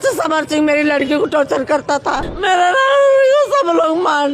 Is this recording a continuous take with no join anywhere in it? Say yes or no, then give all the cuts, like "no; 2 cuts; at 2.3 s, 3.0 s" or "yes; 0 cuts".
no; 1 cut; at 2.3 s